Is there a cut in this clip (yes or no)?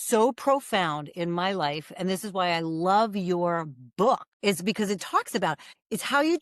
yes